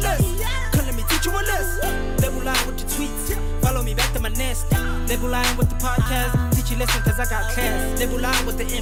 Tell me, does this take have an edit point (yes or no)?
no